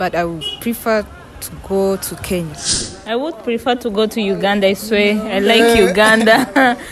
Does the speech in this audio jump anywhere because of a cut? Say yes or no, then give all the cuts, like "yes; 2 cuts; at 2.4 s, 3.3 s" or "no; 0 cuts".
yes; 1 cut; at 2.8 s